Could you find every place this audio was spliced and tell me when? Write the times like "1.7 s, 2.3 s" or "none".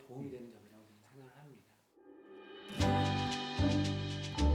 2.0 s